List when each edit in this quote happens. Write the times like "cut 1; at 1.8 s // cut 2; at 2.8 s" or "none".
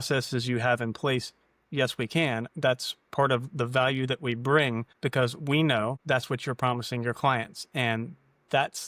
cut 1; at 4.9 s // cut 2; at 6.0 s